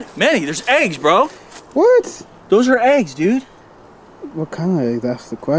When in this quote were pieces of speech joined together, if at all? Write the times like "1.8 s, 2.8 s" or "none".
none

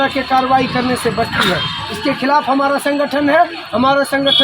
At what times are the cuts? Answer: none

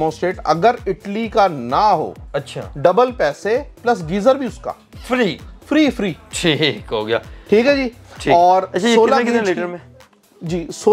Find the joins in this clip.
none

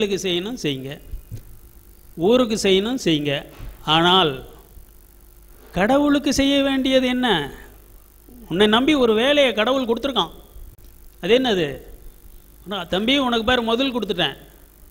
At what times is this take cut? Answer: none

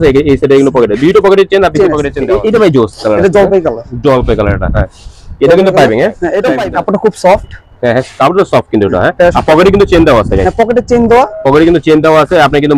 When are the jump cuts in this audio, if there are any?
2.1 s, 6.5 s

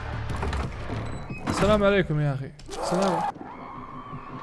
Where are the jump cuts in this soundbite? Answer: 3.3 s

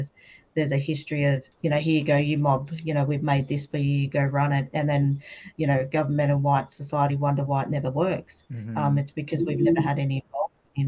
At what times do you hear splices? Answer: 1.5 s

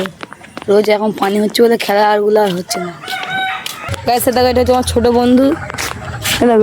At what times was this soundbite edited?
3.8 s

